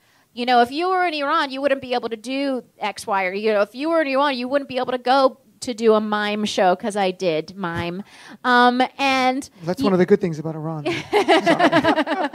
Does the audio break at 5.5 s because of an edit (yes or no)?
yes